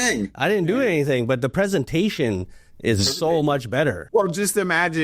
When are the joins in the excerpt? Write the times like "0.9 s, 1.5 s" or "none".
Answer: 4.0 s